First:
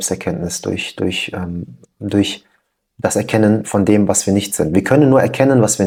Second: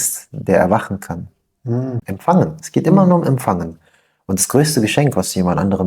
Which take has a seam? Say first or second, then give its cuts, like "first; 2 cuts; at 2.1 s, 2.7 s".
second; 1 cut; at 2.0 s